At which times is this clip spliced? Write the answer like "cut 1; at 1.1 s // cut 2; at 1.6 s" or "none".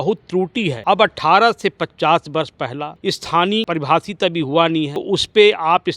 cut 1; at 0.8 s // cut 2; at 2.9 s // cut 3; at 3.7 s // cut 4; at 5.0 s